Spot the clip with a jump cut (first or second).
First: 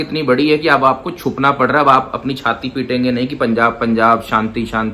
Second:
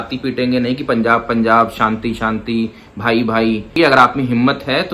second